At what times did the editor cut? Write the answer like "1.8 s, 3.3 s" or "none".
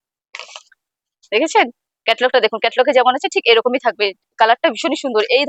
none